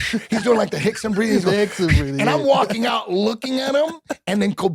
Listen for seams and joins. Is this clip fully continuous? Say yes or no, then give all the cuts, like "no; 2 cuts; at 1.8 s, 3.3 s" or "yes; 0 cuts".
yes; 0 cuts